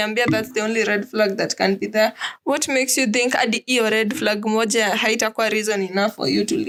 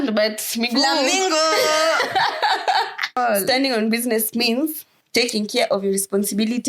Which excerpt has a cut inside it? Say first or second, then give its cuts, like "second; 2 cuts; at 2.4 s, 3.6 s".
second; 1 cut; at 3.2 s